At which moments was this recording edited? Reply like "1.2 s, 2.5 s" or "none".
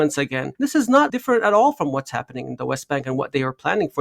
1.1 s